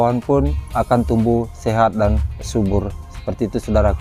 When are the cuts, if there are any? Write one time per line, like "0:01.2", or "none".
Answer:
none